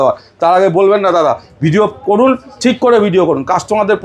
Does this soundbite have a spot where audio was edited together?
no; 0 cuts

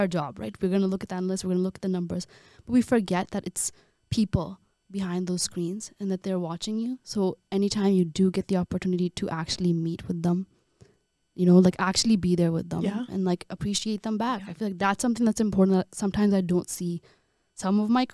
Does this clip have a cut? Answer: no; 0 cuts

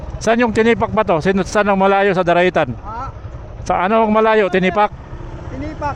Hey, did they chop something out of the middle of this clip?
no; 0 cuts

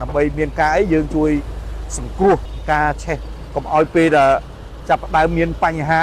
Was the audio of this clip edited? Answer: yes; 1 cut; at 2.5 s

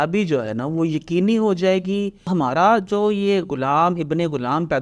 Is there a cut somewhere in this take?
yes; 1 cut; at 2.3 s

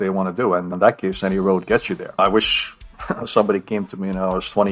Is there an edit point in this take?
yes; 1 cut; at 2.1 s

